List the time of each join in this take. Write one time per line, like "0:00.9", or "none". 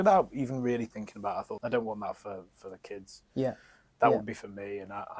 0:01.5